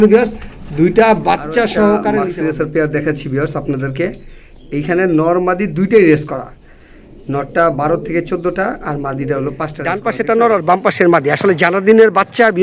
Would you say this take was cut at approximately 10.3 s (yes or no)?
yes